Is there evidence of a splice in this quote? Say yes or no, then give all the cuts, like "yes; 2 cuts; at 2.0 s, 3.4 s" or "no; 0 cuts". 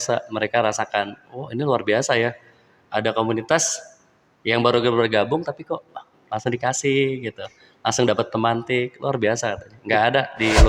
no; 0 cuts